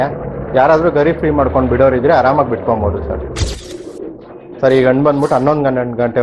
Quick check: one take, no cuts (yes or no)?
no